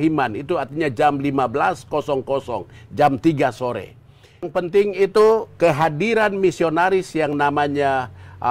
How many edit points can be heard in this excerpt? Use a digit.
1